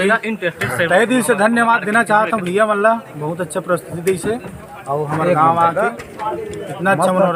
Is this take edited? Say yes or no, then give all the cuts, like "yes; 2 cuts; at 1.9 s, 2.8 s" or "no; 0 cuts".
no; 0 cuts